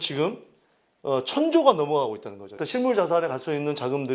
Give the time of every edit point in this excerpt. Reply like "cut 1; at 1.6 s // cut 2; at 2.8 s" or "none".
cut 1; at 2.6 s